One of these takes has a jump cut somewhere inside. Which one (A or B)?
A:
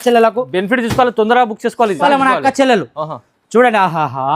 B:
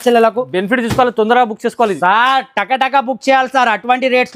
A